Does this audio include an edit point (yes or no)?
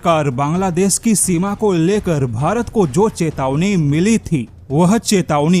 no